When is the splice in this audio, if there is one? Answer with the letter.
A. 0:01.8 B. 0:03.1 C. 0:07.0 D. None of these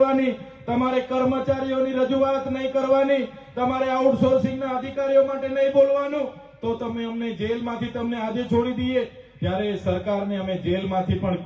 D